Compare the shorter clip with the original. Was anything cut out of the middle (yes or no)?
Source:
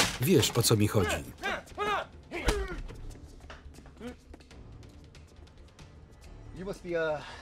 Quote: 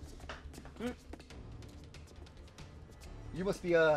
no